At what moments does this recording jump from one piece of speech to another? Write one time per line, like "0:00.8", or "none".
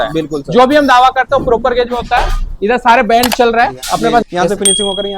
0:04.2

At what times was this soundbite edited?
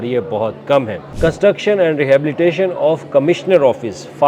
0:01.0

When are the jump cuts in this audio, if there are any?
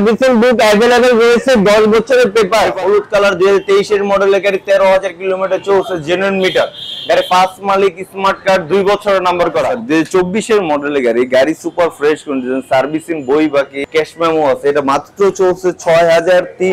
0:02.7
0:09.8
0:13.8

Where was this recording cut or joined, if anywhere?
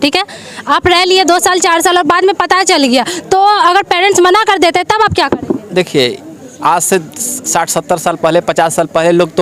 none

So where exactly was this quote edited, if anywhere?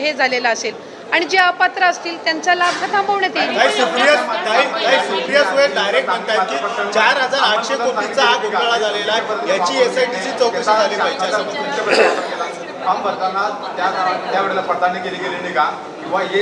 none

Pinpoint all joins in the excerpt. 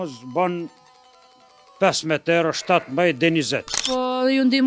0:03.8

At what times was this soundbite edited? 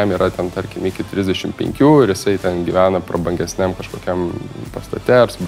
none

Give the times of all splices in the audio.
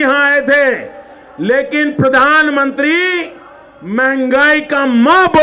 none

